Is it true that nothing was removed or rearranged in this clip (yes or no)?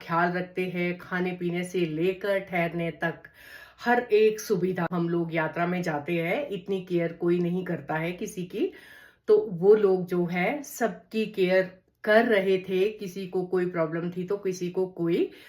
no